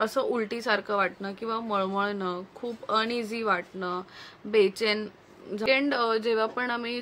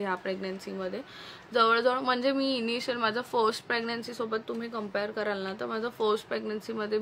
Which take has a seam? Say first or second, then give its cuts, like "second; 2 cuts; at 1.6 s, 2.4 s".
first; 1 cut; at 5.6 s